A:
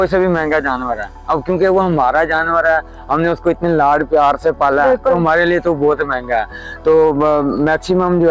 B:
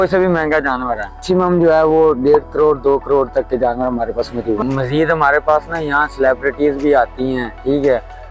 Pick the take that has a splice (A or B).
B